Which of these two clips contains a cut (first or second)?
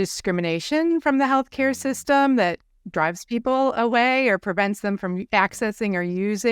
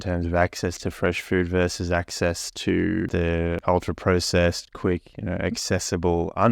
second